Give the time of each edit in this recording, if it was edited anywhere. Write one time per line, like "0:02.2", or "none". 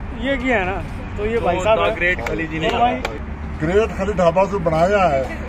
0:03.2